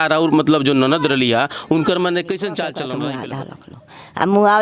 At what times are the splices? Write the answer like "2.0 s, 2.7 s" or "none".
2.9 s